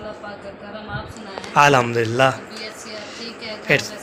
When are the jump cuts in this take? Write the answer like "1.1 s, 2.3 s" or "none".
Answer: none